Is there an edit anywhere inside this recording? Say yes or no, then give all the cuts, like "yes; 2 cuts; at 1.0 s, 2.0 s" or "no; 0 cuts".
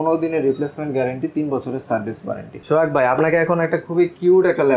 yes; 1 cut; at 2.5 s